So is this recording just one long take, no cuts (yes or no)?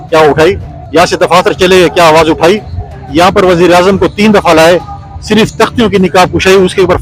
yes